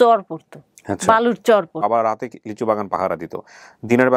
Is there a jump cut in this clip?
yes; 1 cut; at 1.8 s

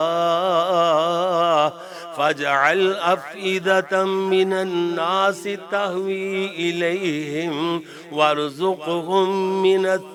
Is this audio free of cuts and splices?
yes; 0 cuts

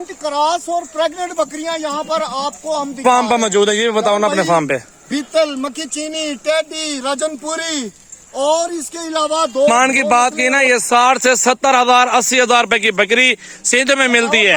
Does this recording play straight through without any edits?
no; 2 cuts; at 3.0 s, 9.7 s

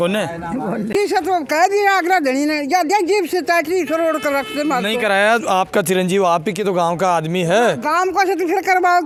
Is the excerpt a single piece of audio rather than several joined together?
yes; 0 cuts

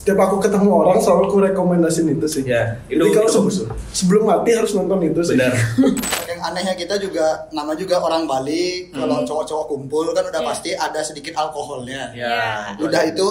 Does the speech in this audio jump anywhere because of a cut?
yes; 1 cut; at 6.1 s

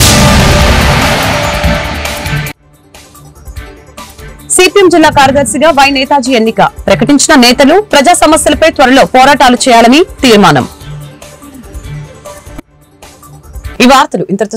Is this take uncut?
yes; 0 cuts

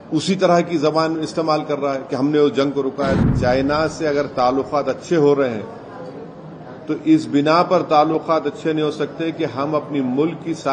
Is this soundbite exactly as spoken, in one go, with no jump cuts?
no; 1 cut; at 3.2 s

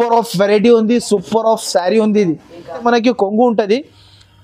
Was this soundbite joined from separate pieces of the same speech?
yes; 1 cut; at 2.8 s

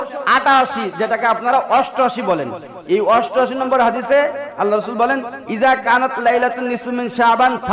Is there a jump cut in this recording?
no; 0 cuts

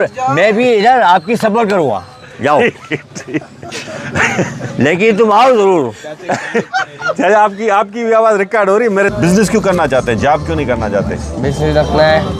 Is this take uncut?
no; 1 cut; at 9.1 s

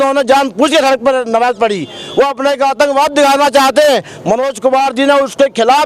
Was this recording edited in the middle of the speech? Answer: no; 0 cuts

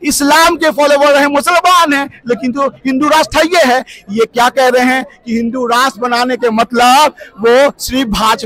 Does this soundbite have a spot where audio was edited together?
no; 0 cuts

